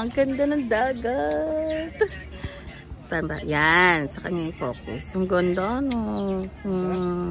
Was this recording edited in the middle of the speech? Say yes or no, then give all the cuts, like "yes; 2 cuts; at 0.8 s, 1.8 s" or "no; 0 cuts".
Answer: no; 0 cuts